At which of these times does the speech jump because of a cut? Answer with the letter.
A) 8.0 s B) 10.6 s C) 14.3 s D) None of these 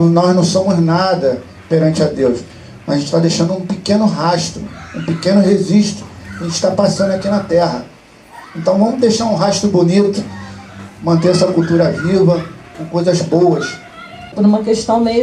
C